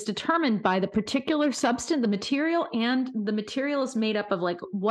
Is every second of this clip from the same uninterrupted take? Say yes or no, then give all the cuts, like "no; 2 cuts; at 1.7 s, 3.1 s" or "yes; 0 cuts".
yes; 0 cuts